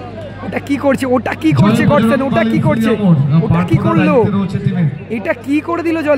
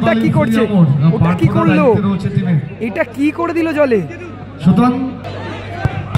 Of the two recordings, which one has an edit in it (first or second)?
second